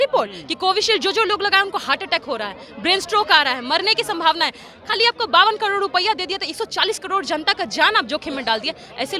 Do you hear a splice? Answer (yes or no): no